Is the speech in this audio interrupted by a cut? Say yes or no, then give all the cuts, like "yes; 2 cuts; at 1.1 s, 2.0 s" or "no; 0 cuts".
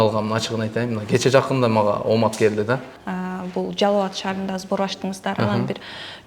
yes; 1 cut; at 3.0 s